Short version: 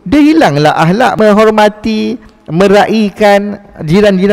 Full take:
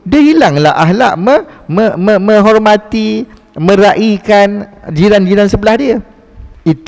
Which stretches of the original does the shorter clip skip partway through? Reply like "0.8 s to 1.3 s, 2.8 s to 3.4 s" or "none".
1.2 s to 2.2 s